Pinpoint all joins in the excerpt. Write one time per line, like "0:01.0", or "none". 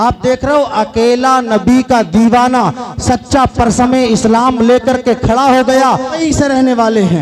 0:06.2